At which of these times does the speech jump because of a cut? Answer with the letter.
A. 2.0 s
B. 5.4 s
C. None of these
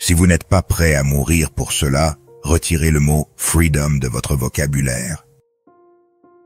B